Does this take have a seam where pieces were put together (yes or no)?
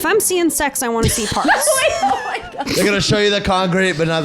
yes